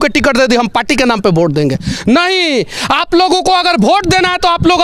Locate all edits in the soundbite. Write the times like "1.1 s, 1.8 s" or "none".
none